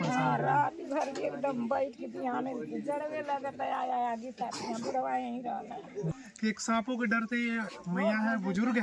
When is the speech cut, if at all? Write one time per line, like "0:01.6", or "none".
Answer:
0:06.1

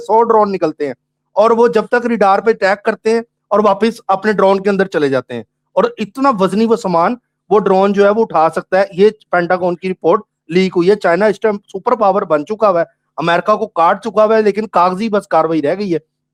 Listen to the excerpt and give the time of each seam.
none

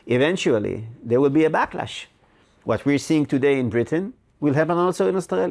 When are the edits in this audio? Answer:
none

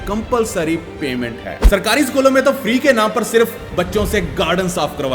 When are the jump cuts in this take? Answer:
0:01.6

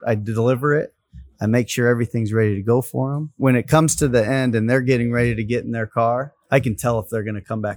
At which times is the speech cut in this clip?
0:03.4
0:06.4

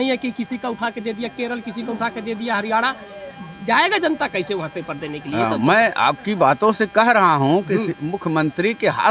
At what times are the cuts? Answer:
none

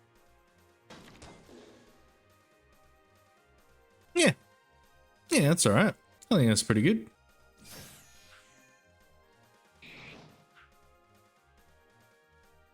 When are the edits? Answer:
0:04.1
0:06.1
0:07.2

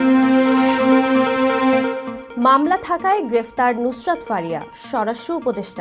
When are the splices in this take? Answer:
none

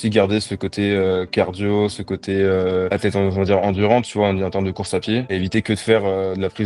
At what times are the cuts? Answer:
none

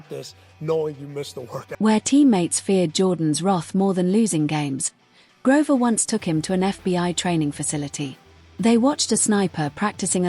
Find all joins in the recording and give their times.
none

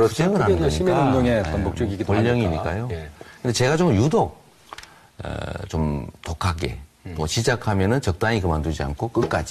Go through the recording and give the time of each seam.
0:07.6

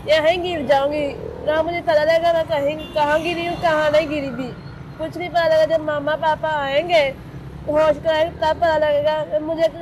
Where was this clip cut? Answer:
none

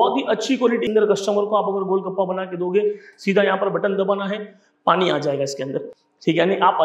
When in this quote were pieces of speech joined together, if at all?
0:00.9

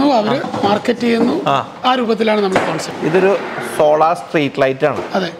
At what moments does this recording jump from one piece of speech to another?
0:02.9

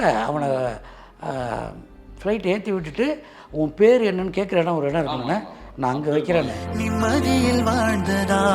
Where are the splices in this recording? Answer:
none

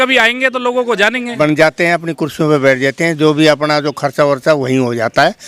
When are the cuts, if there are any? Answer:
0:01.3

